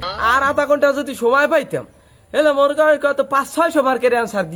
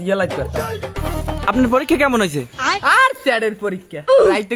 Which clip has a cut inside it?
second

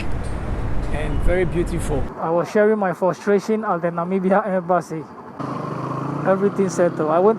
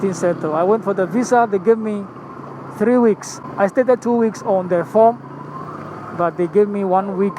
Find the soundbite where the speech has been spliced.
first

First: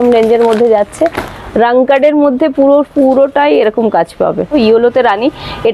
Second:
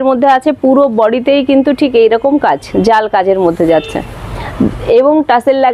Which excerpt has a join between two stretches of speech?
first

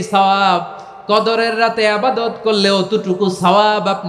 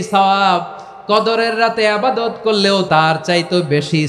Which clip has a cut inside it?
second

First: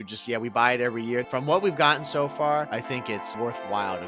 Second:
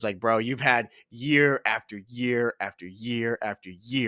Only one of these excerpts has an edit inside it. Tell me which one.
first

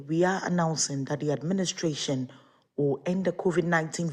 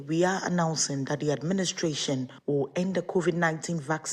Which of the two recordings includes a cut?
second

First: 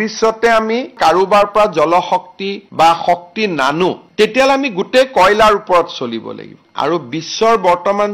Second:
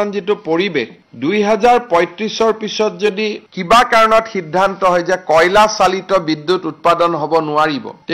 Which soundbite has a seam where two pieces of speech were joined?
first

